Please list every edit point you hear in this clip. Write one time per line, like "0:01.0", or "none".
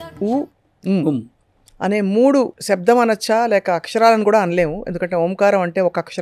0:02.6